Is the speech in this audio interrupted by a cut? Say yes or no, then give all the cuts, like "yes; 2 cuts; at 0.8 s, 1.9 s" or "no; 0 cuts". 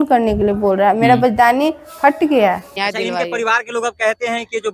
yes; 1 cut; at 2.7 s